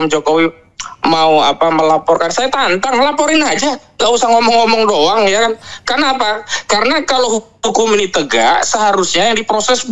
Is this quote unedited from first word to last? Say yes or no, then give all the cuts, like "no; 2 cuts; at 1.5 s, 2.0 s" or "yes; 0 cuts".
yes; 0 cuts